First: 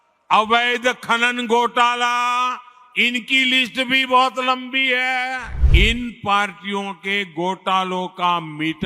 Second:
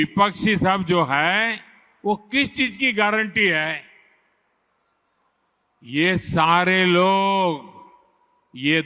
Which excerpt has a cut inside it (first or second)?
first